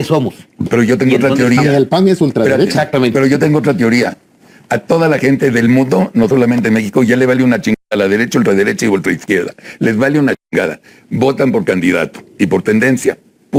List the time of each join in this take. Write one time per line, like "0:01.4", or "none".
none